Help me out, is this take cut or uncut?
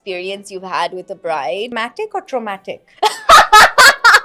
cut